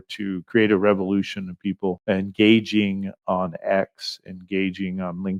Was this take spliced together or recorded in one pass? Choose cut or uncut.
uncut